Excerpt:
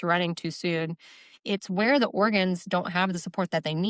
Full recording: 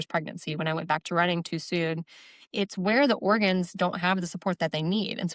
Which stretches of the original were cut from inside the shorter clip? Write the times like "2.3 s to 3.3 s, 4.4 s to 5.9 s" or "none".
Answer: none